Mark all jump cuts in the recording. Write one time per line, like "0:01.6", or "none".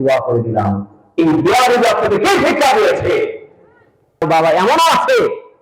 0:04.2